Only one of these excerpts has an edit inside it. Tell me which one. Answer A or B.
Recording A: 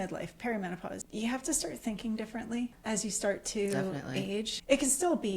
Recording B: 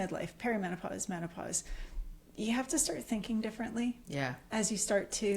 A